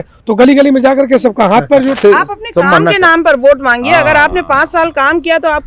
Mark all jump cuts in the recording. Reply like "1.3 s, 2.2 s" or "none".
2.0 s